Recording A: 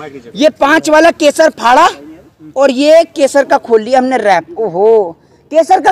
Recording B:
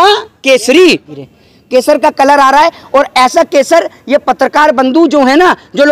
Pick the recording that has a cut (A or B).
B